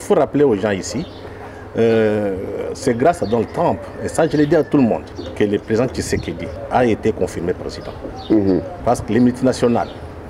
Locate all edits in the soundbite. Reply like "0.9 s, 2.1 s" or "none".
5.2 s, 6.5 s, 8.7 s